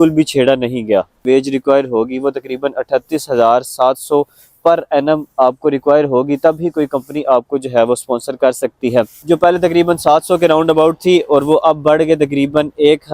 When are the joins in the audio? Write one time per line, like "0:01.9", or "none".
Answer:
0:01.2
0:09.2